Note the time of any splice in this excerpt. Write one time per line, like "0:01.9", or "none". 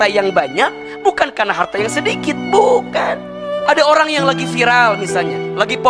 none